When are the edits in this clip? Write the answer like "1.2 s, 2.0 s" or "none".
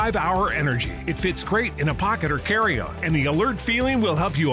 none